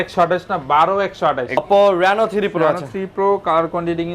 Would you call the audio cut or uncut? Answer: cut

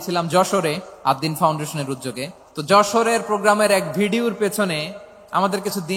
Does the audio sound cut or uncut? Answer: cut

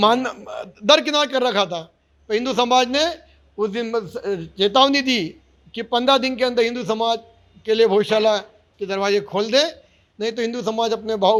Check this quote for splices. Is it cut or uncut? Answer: uncut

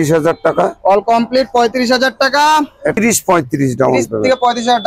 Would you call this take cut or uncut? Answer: cut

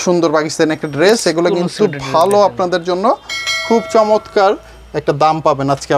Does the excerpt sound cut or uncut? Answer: uncut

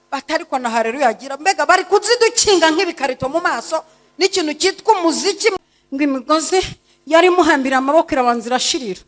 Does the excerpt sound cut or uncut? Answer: cut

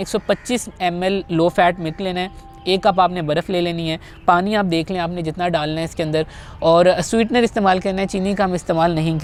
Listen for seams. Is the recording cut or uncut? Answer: uncut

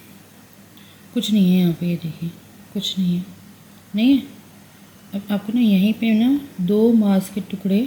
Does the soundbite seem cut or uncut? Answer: uncut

